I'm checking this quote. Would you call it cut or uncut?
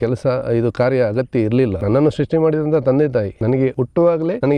cut